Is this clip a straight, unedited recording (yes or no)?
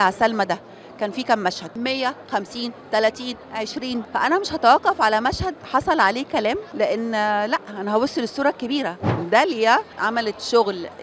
no